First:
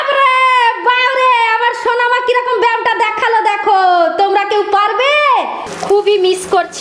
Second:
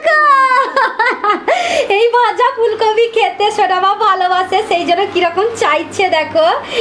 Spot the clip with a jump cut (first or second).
first